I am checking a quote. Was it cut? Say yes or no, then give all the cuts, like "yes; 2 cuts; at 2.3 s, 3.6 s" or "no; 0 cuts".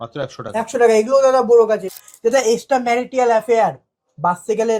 yes; 1 cut; at 1.9 s